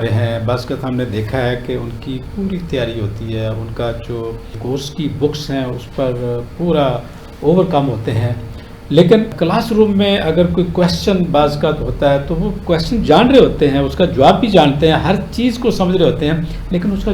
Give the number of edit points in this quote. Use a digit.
0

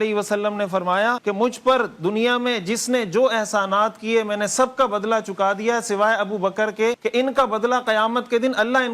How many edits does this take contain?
2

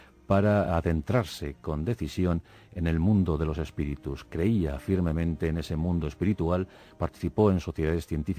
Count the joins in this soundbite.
0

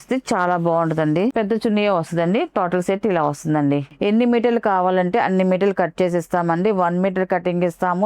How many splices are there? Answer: 2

